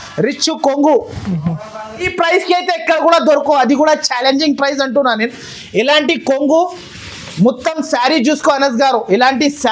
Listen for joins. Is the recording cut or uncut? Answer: cut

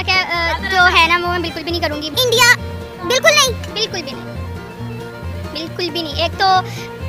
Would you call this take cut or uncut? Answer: uncut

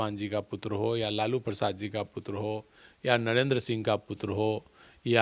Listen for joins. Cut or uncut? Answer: uncut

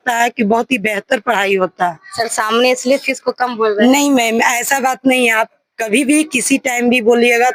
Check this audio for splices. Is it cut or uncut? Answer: uncut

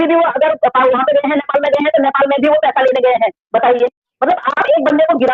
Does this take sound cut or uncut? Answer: uncut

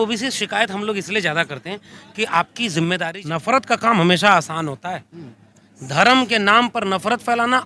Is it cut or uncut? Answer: cut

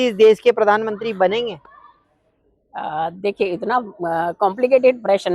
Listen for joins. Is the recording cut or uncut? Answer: uncut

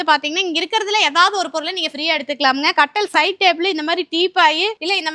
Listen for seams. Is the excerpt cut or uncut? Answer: uncut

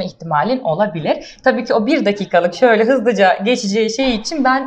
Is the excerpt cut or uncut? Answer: uncut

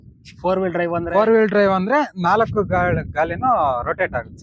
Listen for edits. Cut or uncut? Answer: uncut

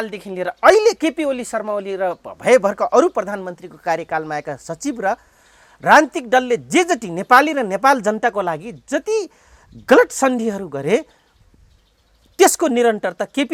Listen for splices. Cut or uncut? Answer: uncut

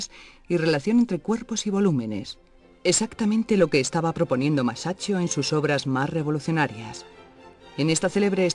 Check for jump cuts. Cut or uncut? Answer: uncut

